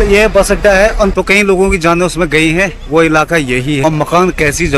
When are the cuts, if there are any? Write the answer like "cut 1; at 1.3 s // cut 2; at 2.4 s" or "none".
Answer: cut 1; at 1.1 s // cut 2; at 3.8 s